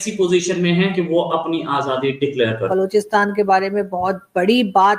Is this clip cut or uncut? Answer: cut